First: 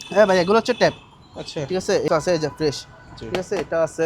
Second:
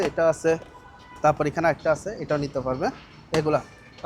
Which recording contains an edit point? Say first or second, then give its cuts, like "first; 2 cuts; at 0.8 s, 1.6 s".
first; 1 cut; at 2.1 s